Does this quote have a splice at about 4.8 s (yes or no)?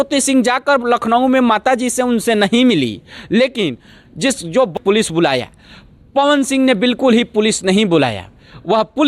yes